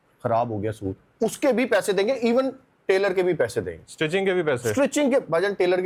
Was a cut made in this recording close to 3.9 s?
no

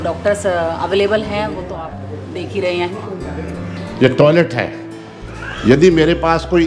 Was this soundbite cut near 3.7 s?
yes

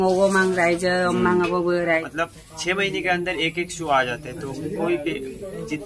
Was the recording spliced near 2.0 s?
yes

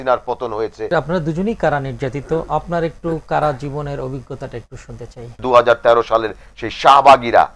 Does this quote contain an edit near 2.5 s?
no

